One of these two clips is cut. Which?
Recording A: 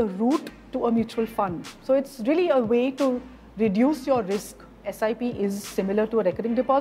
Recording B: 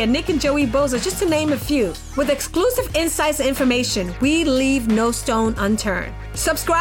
A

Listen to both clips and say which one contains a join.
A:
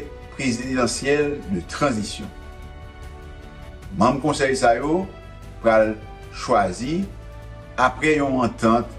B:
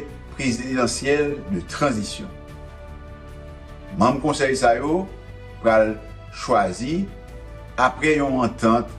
B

